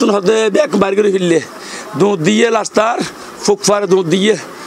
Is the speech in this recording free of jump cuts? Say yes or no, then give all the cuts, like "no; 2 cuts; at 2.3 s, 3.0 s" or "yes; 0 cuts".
yes; 0 cuts